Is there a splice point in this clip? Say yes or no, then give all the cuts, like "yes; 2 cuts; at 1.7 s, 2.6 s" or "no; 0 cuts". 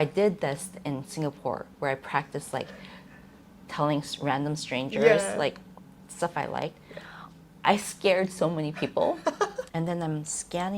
yes; 1 cut; at 9.6 s